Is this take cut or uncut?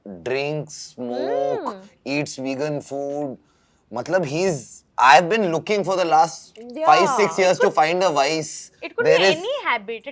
uncut